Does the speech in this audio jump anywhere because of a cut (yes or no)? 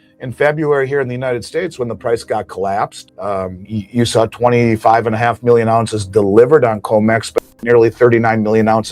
yes